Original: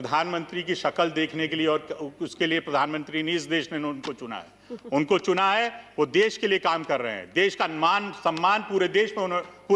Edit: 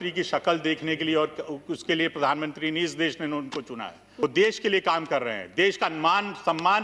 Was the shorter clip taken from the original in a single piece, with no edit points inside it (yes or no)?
no